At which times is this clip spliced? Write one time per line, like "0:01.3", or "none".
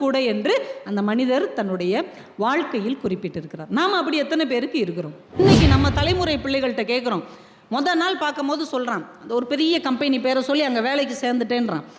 0:05.4

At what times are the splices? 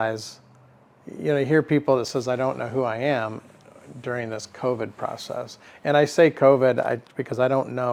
none

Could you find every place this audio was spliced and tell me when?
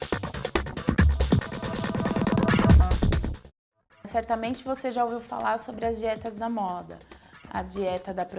0:00.9

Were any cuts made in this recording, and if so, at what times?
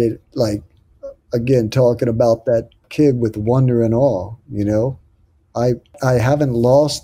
0:02.8
0:06.0

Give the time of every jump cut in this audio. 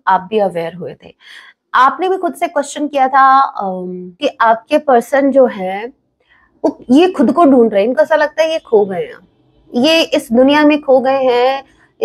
0:04.2

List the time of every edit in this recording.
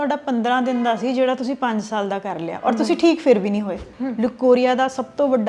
0:03.8

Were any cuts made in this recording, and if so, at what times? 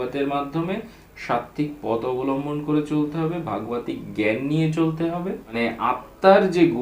0:05.5

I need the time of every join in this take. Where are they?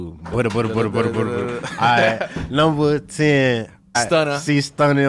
0:04.0

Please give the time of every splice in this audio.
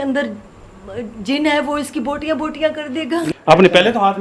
0:03.3

